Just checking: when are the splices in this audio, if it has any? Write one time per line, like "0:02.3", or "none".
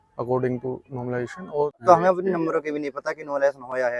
0:01.7